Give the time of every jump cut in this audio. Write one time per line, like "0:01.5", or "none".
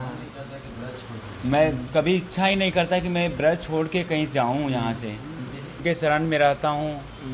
0:05.8